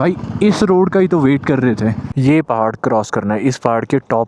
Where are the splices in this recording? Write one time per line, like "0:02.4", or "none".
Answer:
0:02.1